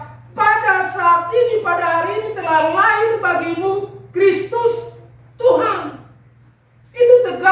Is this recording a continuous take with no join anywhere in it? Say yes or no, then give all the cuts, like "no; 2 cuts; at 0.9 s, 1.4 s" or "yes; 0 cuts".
yes; 0 cuts